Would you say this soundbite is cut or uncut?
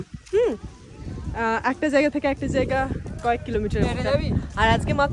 uncut